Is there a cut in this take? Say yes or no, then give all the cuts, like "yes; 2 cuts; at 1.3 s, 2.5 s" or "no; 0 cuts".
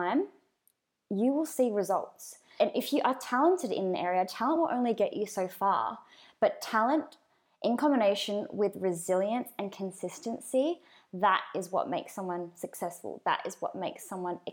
yes; 1 cut; at 2.5 s